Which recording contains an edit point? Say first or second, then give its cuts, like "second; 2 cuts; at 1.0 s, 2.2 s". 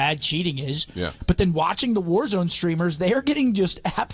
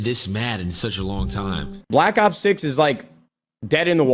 second; 1 cut; at 1.7 s